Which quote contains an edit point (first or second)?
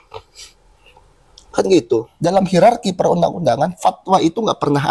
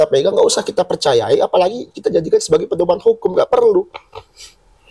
first